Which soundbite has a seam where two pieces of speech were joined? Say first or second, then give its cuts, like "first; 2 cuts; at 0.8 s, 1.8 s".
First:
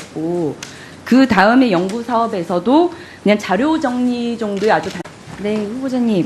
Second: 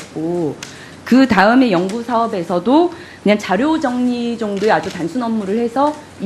second; 1 cut; at 5.0 s